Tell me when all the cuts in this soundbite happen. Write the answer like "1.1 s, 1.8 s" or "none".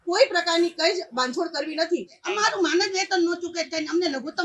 2.1 s